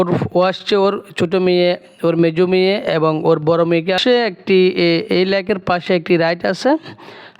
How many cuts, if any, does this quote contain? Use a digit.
1